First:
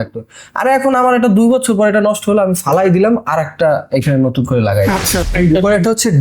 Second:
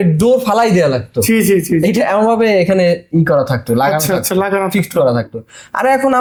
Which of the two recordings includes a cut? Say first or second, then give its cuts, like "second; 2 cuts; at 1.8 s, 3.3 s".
first; 1 cut; at 5.2 s